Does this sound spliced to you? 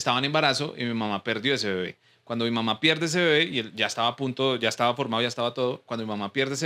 no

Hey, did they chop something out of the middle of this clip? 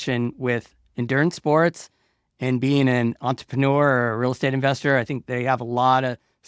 no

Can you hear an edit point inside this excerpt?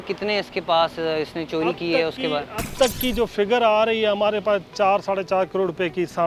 no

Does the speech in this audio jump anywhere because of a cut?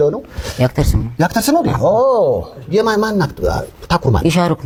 no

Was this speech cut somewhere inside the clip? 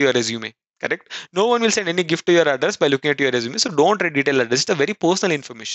no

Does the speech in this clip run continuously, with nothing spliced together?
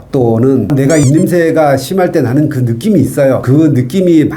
no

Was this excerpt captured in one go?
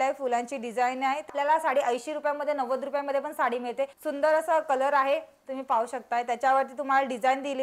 no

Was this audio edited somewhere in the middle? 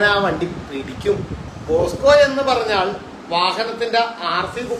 yes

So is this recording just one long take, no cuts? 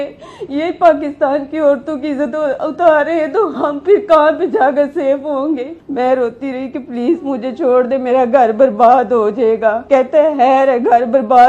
no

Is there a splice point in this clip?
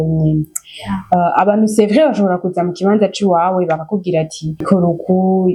no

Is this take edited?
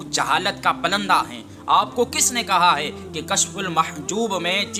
no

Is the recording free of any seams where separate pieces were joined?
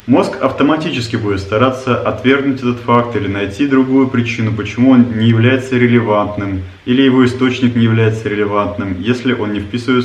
yes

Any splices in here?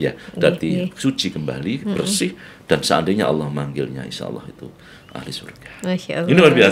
no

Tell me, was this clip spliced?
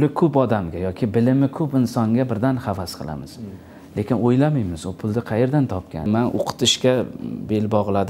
yes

